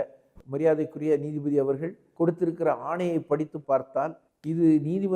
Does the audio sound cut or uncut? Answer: uncut